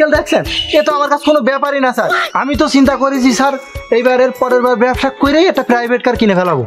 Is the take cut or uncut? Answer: uncut